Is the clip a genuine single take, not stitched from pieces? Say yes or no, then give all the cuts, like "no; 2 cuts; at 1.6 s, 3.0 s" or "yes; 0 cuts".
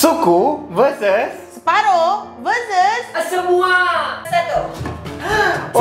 no; 1 cut; at 4.3 s